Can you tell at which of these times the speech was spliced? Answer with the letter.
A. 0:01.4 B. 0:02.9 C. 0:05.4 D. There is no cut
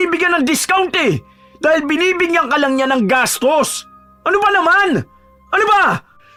D